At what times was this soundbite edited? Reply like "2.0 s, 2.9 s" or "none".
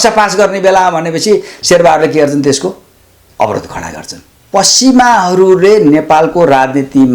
4.4 s